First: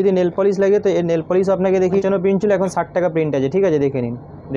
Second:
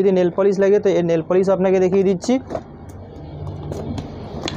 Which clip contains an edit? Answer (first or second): first